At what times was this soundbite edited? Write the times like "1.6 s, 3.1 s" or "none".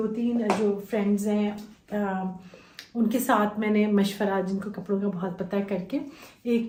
none